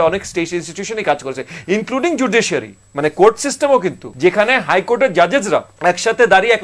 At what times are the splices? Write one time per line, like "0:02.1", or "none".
0:04.1
0:05.7